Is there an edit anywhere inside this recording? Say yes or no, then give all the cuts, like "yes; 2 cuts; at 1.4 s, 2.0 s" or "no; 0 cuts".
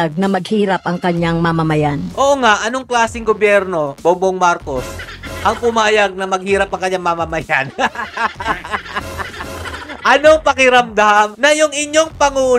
no; 0 cuts